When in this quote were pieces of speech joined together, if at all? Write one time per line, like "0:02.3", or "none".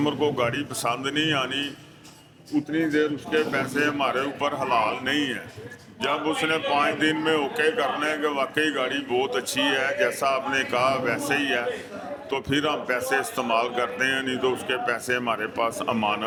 none